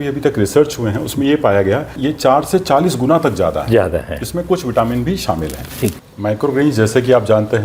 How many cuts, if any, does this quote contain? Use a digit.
2